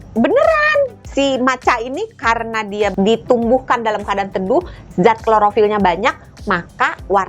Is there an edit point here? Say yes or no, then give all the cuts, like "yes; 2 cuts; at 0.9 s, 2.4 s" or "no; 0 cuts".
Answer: yes; 2 cuts; at 1.0 s, 2.9 s